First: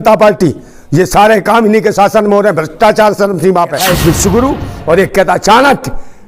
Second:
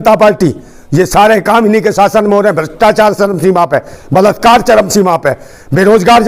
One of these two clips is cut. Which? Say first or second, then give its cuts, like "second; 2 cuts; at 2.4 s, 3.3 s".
first; 1 cut; at 3.9 s